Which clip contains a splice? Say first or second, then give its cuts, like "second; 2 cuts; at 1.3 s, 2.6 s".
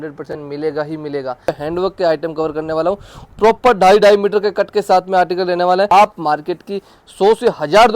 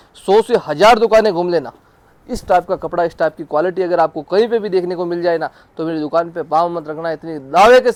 first; 2 cuts; at 1.5 s, 5.9 s